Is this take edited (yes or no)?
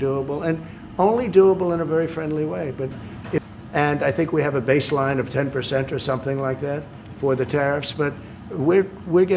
yes